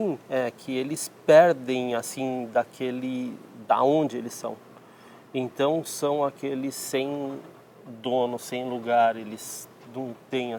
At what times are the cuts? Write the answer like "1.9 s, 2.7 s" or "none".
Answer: none